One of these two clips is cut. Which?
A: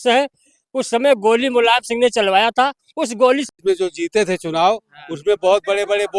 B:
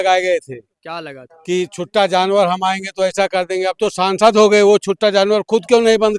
A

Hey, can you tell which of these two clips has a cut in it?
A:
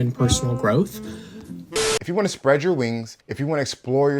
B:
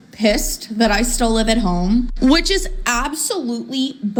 A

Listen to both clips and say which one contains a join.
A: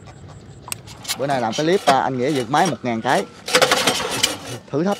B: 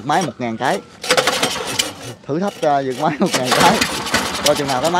A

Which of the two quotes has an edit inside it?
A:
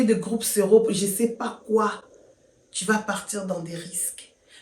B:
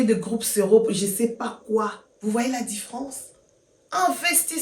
B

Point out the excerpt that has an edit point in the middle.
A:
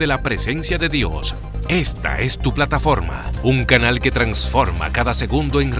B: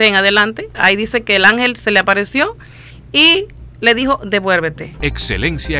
B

